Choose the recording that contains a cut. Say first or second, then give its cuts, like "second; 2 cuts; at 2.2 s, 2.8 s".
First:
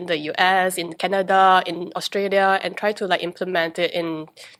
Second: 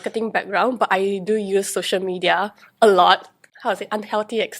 second; 1 cut; at 3.4 s